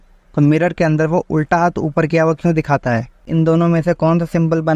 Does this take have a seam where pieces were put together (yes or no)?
yes